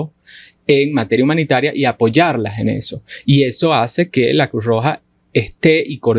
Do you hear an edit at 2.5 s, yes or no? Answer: no